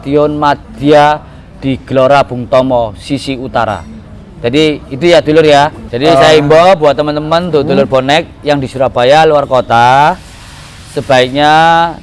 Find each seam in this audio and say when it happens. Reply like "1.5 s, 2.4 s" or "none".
5.8 s